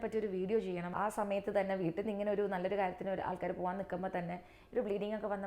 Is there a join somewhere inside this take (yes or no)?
yes